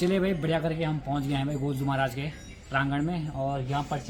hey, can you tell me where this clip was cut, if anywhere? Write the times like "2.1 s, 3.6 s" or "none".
none